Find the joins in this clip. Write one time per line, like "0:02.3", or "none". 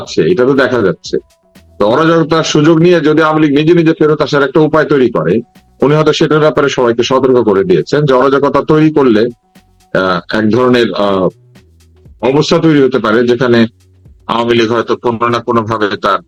none